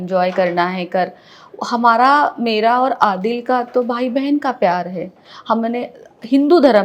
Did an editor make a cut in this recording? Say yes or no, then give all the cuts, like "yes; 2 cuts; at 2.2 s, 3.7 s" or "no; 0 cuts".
no; 0 cuts